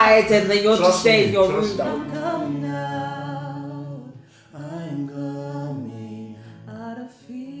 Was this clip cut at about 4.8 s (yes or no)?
no